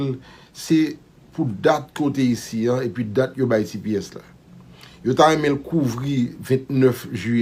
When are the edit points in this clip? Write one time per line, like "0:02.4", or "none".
none